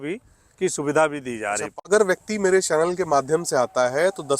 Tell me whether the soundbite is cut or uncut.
cut